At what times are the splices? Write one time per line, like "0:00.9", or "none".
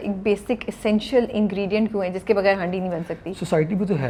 none